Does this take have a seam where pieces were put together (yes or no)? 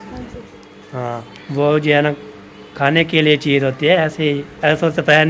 no